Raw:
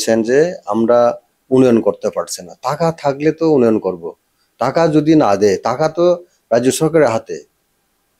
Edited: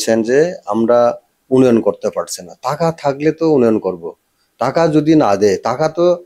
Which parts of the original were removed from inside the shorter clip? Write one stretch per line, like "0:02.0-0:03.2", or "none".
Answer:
none